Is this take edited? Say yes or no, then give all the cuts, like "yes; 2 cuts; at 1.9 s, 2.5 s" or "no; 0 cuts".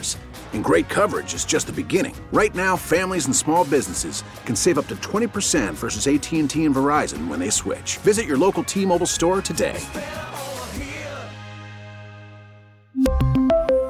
no; 0 cuts